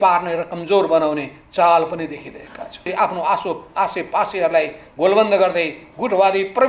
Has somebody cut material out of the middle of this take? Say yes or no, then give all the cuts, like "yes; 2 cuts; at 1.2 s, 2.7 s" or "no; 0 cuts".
yes; 1 cut; at 2.9 s